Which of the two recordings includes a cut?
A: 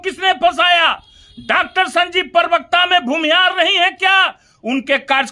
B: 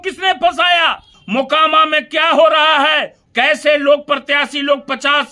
B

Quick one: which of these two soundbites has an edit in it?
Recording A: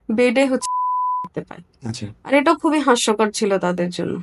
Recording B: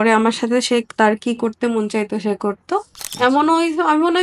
B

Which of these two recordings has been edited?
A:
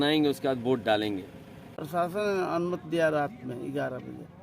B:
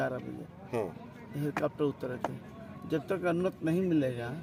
A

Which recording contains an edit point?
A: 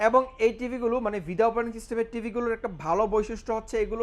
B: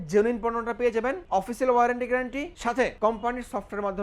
B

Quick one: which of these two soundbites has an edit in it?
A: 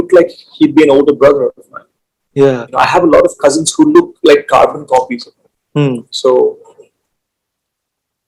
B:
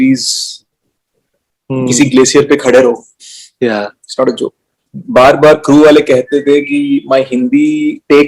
B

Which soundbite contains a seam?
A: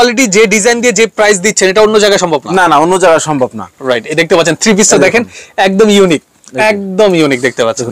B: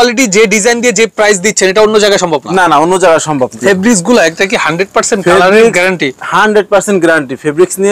B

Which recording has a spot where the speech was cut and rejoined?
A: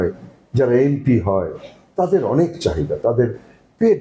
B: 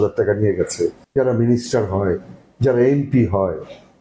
B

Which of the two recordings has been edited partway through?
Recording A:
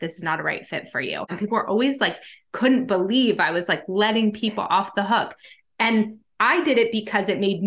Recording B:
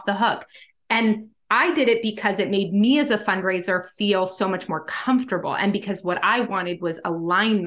A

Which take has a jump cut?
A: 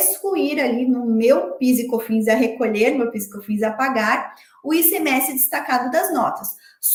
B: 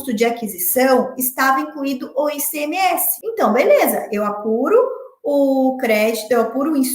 B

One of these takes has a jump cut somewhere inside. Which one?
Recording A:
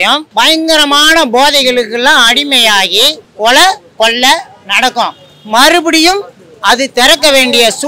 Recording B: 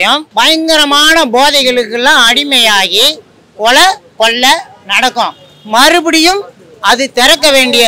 A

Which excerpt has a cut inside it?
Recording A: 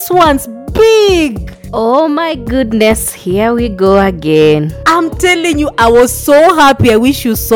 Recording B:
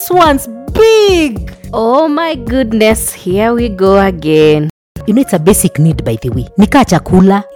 B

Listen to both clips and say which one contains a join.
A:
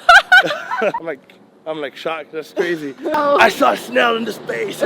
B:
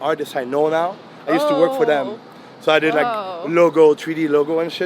A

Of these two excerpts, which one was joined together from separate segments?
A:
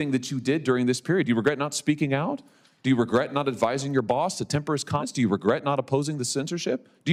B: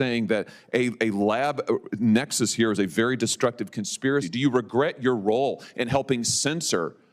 B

